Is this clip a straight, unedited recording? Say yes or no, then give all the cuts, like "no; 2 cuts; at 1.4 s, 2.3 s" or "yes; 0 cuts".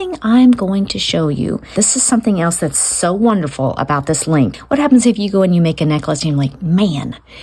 no; 2 cuts; at 1.7 s, 4.5 s